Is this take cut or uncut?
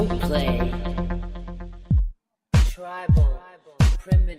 cut